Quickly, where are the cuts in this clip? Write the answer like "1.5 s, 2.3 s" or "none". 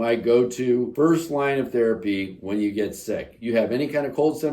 0.9 s